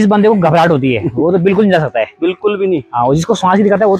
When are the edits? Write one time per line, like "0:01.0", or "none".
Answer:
none